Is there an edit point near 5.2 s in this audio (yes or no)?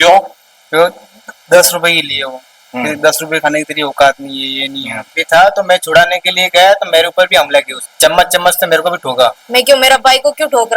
yes